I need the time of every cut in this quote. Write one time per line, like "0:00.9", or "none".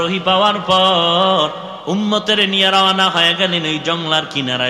0:01.7